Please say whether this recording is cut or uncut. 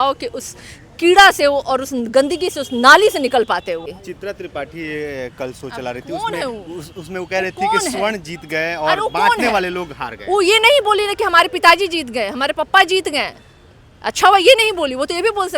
cut